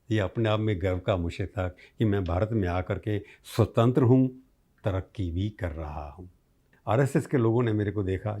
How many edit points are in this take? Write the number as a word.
one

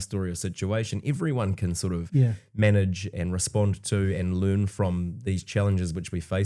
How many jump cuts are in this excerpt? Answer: zero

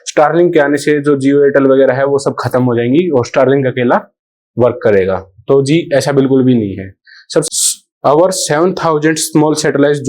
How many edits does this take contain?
one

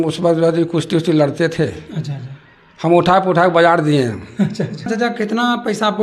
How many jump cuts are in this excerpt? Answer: one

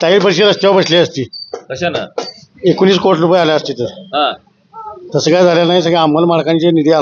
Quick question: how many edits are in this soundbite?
zero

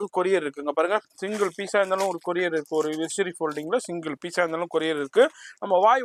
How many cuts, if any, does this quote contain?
zero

